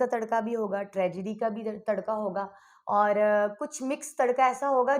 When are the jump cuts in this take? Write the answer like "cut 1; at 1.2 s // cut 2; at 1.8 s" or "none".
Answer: none